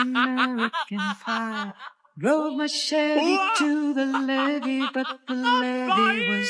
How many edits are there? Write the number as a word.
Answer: zero